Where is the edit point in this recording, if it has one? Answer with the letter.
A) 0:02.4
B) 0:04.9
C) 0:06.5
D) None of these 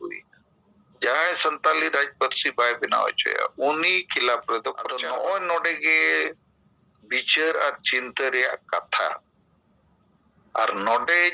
B